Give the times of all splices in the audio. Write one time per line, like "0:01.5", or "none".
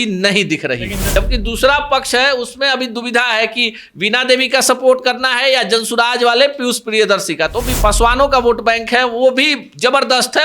0:01.0
0:07.8